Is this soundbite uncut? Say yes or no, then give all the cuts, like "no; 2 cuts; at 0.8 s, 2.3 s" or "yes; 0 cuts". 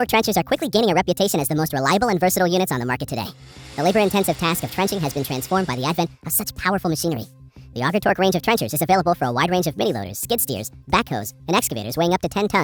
yes; 0 cuts